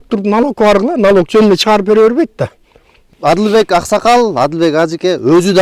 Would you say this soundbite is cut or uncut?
cut